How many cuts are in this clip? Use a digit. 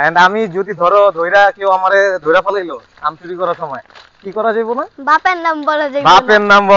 0